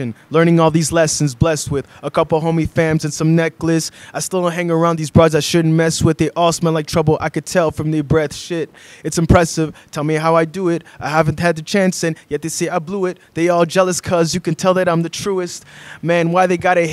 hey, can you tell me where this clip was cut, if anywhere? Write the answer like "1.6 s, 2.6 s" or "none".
none

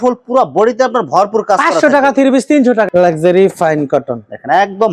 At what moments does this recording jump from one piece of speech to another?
2.9 s

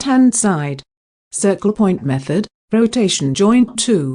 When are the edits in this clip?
2.8 s

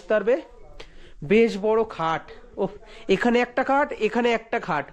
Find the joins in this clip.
none

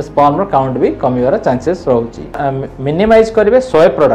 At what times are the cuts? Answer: 2.4 s

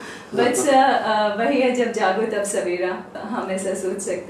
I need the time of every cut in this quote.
3.2 s

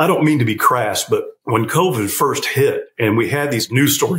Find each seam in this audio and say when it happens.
1.3 s, 3.3 s

